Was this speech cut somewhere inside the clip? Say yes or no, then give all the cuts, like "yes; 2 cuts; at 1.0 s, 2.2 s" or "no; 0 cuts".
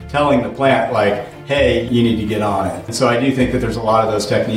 yes; 2 cuts; at 1.9 s, 2.9 s